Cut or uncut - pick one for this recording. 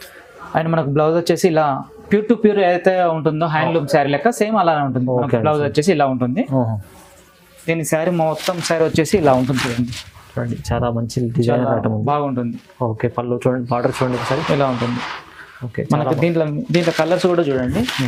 uncut